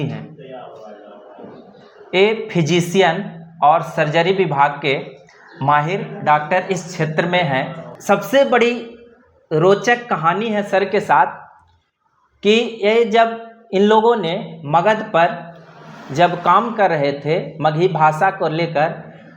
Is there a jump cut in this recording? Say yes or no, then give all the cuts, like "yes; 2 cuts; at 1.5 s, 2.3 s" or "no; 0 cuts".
yes; 1 cut; at 7.9 s